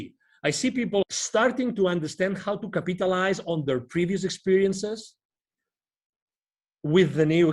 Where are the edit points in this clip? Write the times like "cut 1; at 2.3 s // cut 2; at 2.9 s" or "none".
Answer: cut 1; at 1.0 s